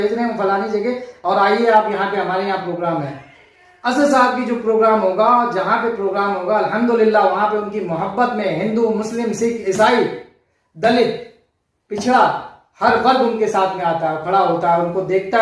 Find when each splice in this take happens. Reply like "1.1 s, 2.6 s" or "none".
none